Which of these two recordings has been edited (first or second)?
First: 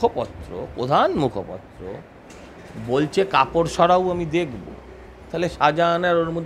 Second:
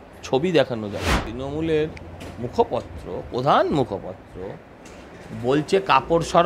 second